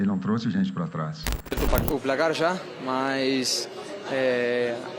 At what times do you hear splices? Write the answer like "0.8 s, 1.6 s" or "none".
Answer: 1.6 s